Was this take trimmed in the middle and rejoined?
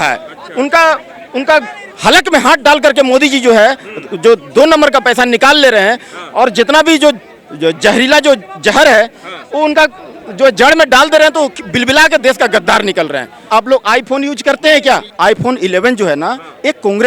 yes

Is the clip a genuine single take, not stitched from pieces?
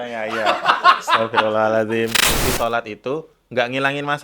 no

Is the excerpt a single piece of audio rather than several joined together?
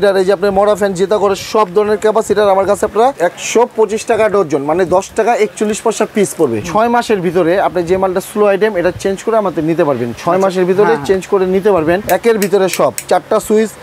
no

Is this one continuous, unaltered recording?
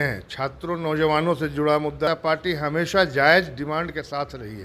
no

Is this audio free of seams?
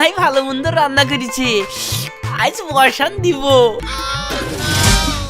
no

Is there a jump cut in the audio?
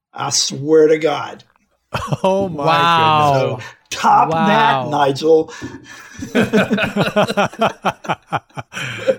no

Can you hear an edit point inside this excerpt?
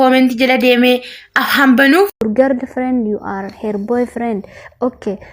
yes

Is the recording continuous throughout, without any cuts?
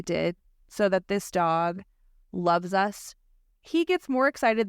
no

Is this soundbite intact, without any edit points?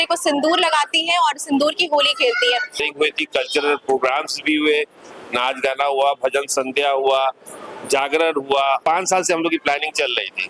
no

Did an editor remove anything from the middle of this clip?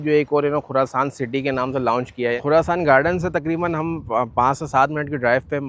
yes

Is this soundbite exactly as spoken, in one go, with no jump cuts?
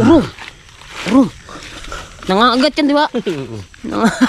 yes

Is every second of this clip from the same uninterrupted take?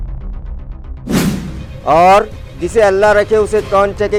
yes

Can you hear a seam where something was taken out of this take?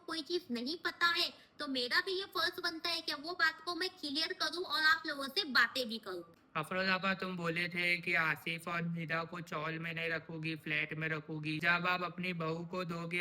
yes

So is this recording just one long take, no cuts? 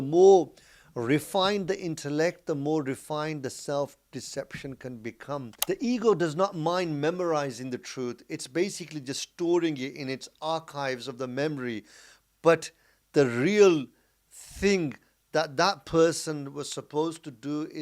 no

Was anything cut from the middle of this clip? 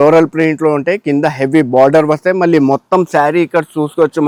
no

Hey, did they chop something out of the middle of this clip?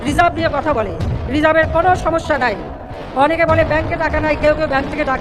no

